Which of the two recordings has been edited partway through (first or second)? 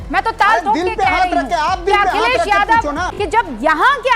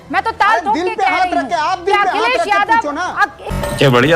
first